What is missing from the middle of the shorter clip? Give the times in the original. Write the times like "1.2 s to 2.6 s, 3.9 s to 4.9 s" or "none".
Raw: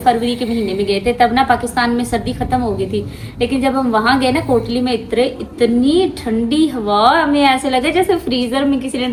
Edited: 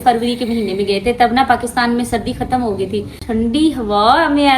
3.2 s to 6.2 s